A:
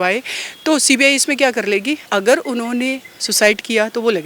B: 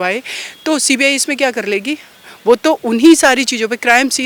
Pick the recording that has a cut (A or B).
A